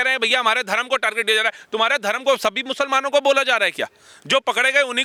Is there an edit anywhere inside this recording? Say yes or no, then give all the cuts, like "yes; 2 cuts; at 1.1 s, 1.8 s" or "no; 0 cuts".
no; 0 cuts